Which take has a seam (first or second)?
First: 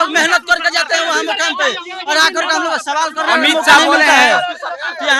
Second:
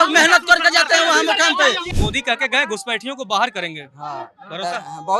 second